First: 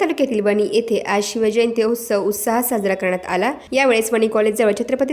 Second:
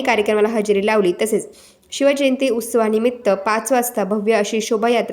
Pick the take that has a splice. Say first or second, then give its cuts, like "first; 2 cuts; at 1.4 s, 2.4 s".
first; 1 cut; at 3.6 s